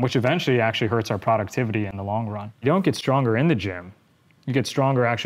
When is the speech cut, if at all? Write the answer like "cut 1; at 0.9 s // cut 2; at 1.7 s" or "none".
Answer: cut 1; at 2.6 s